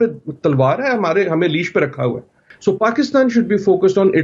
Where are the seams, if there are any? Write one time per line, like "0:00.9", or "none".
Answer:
0:02.5